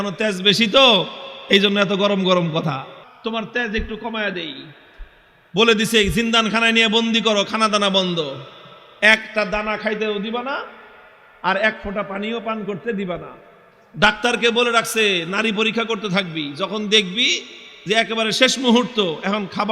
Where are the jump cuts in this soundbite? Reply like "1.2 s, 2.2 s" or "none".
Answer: 3.0 s